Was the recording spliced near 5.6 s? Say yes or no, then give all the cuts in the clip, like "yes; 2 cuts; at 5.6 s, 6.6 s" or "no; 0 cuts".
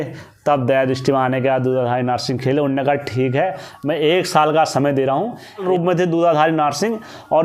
yes; 2 cuts; at 1.4 s, 5.6 s